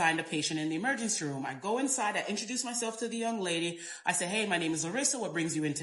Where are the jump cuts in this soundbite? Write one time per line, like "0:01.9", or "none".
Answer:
none